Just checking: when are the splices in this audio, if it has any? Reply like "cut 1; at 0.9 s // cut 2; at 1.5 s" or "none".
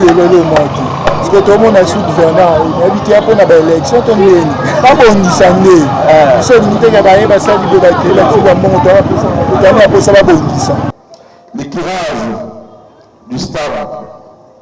cut 1; at 10.9 s